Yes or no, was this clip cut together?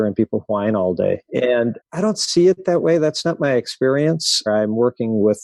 yes